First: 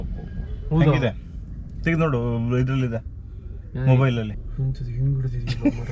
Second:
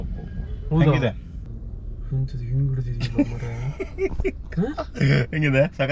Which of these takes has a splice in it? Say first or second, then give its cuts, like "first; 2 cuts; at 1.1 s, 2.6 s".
second; 1 cut; at 1.8 s